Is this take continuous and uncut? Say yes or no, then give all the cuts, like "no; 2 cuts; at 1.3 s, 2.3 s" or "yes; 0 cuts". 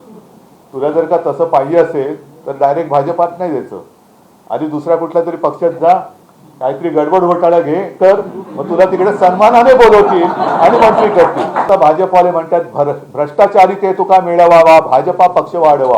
no; 1 cut; at 11.7 s